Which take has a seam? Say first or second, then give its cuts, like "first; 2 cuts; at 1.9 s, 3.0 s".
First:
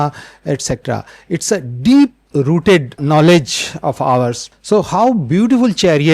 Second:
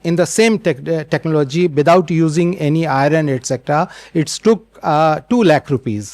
first; 2 cuts; at 3.0 s, 4.4 s